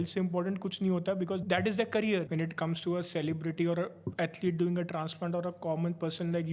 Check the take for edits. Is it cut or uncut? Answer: cut